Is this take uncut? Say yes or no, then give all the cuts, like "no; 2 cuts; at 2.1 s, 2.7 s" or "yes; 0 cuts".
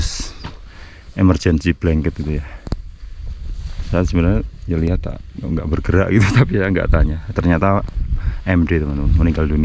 yes; 0 cuts